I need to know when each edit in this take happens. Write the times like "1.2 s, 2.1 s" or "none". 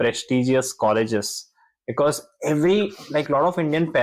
none